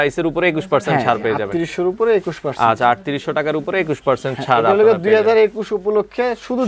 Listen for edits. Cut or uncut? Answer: uncut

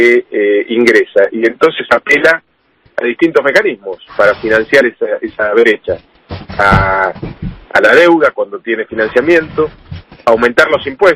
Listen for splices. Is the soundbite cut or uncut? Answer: uncut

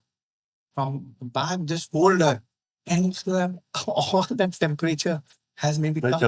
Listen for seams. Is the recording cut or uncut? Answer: uncut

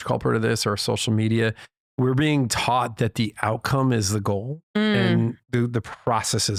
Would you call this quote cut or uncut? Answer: uncut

